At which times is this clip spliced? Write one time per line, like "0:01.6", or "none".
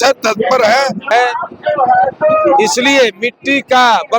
0:01.1